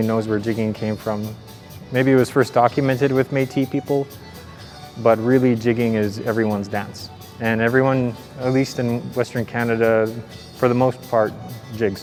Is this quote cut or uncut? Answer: uncut